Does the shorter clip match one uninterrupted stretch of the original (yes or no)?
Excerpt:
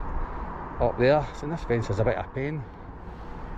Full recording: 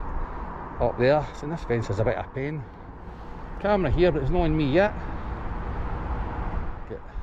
yes